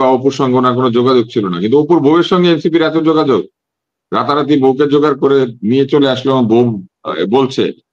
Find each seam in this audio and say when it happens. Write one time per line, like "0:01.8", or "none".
none